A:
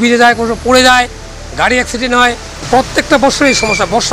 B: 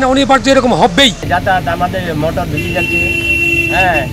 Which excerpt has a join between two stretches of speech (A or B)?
B